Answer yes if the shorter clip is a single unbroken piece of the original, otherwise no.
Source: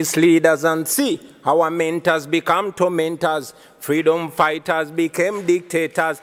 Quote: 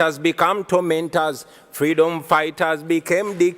yes